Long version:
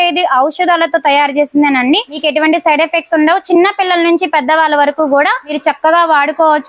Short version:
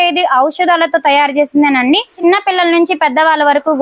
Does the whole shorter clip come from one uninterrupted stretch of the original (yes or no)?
no